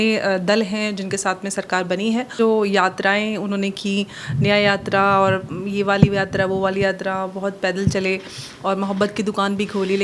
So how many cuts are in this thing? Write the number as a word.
one